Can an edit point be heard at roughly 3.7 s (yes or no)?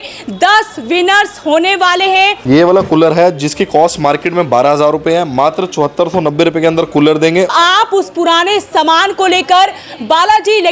no